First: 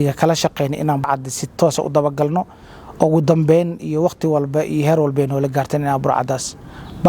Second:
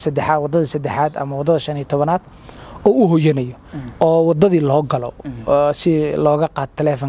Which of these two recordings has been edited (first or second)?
first